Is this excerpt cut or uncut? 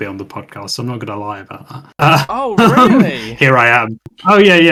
uncut